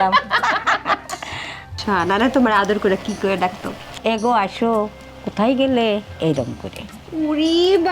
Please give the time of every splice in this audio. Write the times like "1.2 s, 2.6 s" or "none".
none